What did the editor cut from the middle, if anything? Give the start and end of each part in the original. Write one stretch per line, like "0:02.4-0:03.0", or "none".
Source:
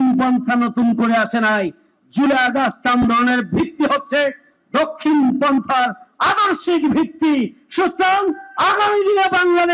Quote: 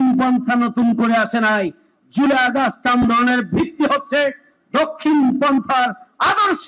none